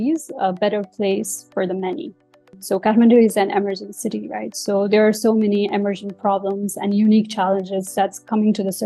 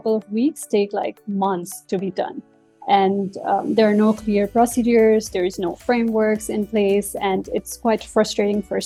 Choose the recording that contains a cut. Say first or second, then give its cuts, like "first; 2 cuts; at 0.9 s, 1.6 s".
first; 1 cut; at 2.5 s